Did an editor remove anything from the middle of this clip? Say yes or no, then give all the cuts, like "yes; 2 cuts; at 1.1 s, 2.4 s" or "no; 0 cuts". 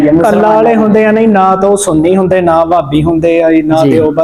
no; 0 cuts